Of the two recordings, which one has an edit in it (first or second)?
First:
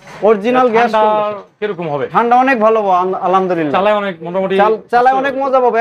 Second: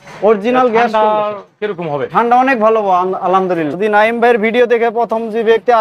second